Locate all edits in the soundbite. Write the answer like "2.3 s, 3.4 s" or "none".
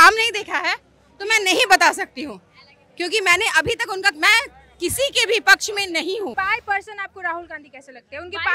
6.3 s

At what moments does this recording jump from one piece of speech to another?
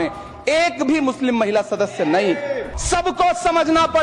2.7 s

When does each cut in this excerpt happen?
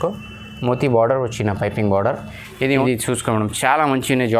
2.8 s

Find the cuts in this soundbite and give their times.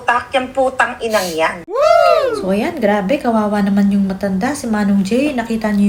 none

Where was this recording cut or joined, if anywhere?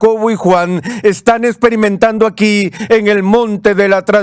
none

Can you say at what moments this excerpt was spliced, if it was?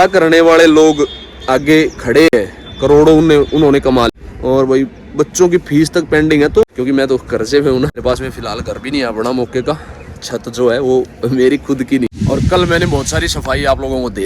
4.1 s, 6.6 s, 8.0 s, 12.1 s

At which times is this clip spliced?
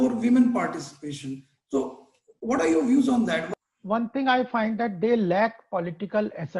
3.5 s

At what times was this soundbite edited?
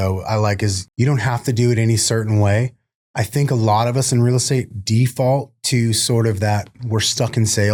none

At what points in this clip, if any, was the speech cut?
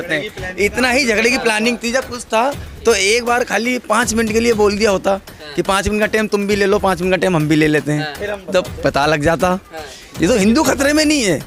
none

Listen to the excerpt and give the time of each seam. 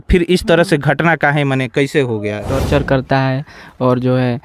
2.6 s

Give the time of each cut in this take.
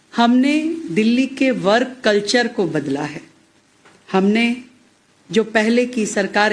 5.6 s

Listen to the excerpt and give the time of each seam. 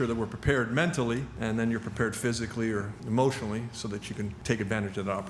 1.3 s, 2.9 s, 4.4 s

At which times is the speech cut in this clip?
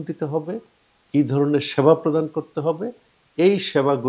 none

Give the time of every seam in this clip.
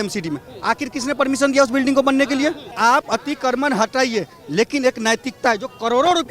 2.7 s

